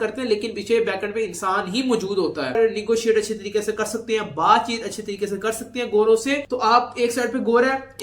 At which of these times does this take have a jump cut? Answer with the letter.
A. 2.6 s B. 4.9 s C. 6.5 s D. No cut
A